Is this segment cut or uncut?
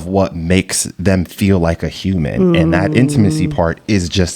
uncut